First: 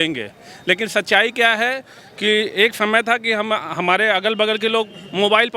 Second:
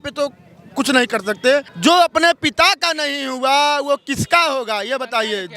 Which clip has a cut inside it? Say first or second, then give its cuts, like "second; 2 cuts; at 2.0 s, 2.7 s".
second; 1 cut; at 1.7 s